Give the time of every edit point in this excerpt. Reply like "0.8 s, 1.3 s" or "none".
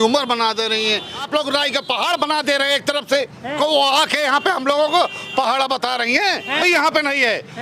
1.2 s, 3.5 s, 6.6 s

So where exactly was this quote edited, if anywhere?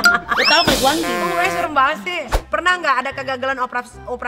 2.5 s

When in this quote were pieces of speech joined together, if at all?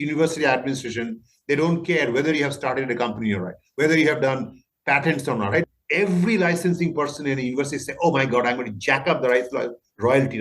5.7 s

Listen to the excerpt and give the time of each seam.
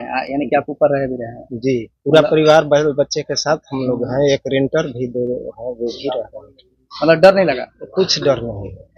none

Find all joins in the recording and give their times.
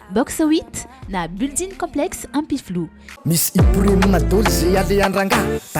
3.1 s

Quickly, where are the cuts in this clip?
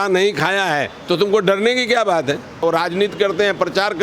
2.6 s

